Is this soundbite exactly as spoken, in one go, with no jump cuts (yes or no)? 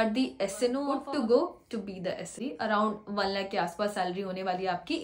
no